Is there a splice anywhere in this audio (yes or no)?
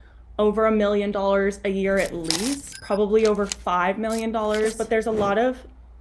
yes